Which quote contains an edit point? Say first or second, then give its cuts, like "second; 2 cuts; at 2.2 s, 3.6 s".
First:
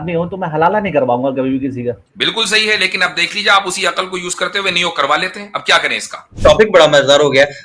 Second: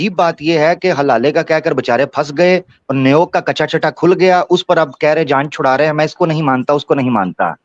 first; 2 cuts; at 2.1 s, 6.2 s